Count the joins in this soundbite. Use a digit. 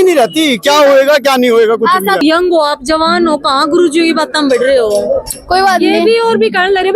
1